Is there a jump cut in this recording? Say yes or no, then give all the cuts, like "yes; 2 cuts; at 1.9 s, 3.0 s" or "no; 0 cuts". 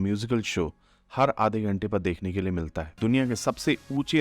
yes; 1 cut; at 2.9 s